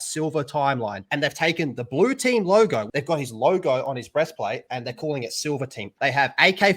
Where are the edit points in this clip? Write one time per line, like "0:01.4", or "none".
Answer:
0:02.9
0:05.9

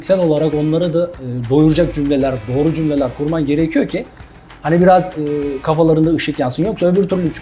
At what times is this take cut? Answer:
none

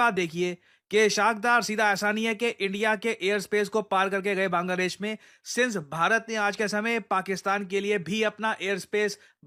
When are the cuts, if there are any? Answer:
none

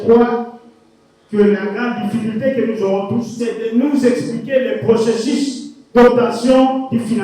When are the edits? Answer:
0:03.3

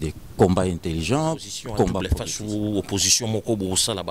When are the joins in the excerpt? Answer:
0:02.2

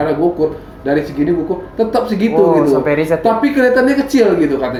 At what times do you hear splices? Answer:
none

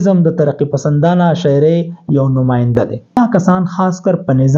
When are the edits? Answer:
0:03.2

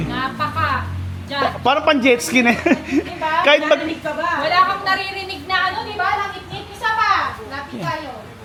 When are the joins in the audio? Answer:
none

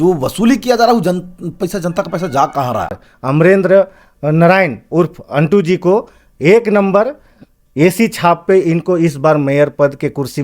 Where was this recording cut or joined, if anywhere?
0:02.9

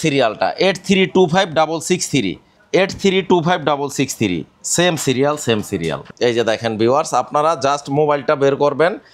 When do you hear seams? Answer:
0:06.1

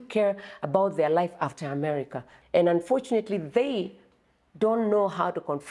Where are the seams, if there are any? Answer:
0:02.3

